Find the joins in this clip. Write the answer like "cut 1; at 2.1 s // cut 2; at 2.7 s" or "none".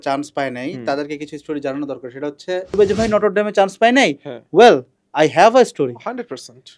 cut 1; at 2.8 s